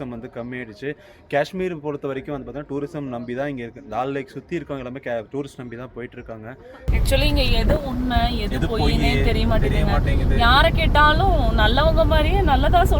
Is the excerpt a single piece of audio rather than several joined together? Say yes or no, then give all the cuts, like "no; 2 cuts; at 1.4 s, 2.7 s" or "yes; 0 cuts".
no; 1 cut; at 6.8 s